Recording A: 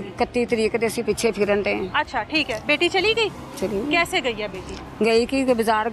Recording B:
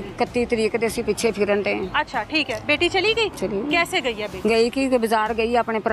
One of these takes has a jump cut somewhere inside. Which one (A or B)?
B